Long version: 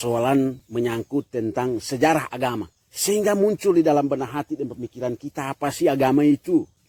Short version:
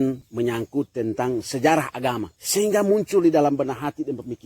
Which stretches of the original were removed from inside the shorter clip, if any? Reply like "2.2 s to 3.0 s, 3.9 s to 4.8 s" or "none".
2.7 s to 2.9 s